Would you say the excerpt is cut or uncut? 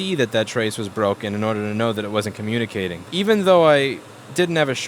cut